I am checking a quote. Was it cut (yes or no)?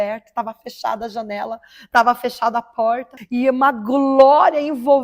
yes